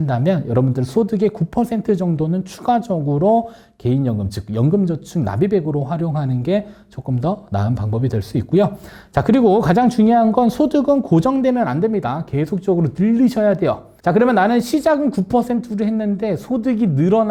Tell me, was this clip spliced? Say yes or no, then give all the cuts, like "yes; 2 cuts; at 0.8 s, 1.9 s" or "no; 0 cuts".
no; 0 cuts